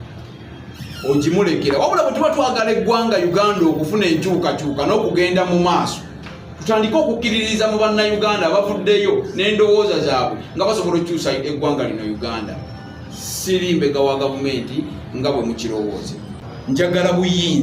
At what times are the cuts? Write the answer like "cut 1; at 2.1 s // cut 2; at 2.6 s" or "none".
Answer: cut 1; at 16.3 s